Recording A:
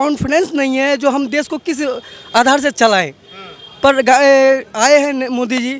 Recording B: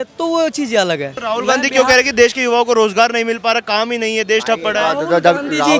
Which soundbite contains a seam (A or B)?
B